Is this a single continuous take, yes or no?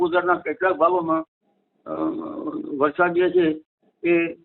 yes